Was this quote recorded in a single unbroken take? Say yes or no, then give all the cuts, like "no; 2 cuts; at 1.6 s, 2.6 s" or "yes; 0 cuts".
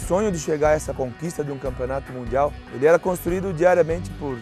no; 2 cuts; at 0.9 s, 2.6 s